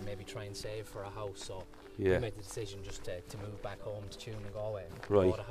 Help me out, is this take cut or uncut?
uncut